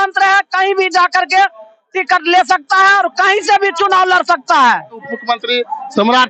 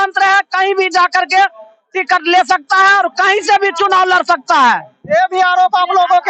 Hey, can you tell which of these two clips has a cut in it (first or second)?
first